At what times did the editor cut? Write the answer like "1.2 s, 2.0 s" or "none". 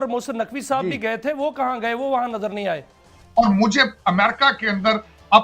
3.0 s